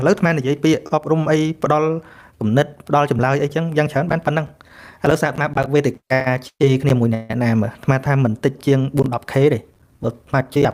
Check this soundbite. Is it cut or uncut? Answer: uncut